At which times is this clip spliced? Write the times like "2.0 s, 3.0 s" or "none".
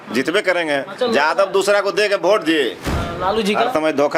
2.9 s